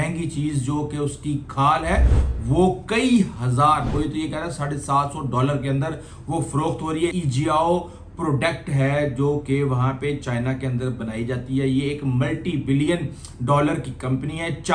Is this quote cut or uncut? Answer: cut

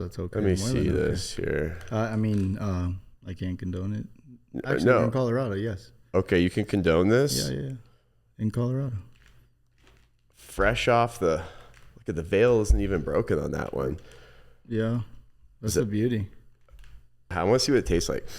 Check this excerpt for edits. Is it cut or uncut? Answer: cut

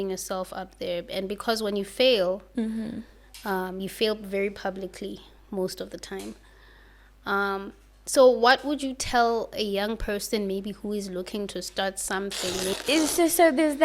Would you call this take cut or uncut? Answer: cut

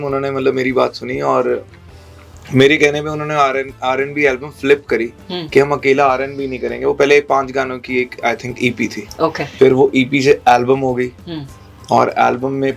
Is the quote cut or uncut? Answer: uncut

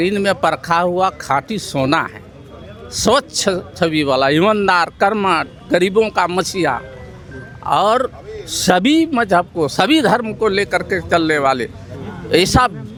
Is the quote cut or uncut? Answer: uncut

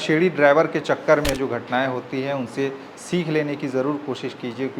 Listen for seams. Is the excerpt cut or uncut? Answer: cut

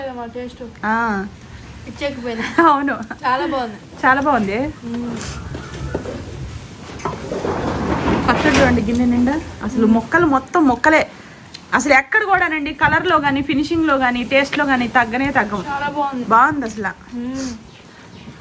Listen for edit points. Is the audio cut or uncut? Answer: uncut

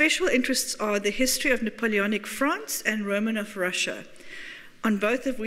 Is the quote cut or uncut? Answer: cut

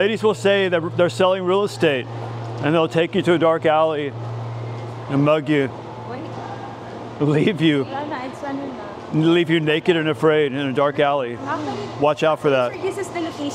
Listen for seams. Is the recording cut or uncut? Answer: uncut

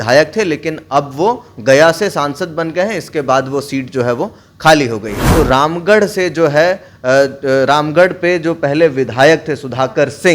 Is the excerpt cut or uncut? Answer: cut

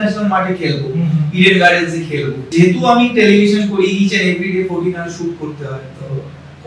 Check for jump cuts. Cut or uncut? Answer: cut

